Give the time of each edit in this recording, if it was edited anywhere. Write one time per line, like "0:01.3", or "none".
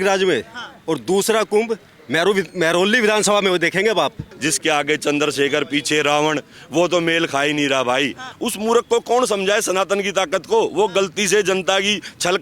0:04.3
0:08.3

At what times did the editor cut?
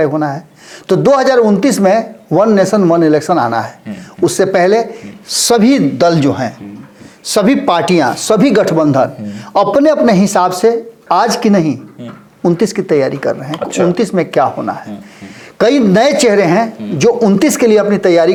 none

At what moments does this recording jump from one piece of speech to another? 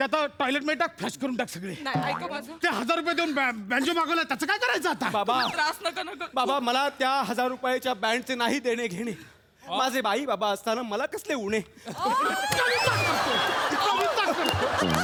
none

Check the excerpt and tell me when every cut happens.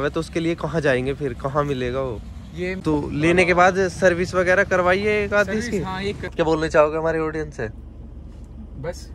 0:02.8
0:06.3

